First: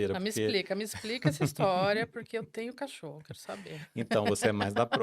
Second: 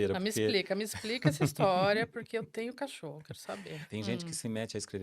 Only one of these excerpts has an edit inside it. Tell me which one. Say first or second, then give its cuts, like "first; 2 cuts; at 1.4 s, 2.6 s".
second; 1 cut; at 3.8 s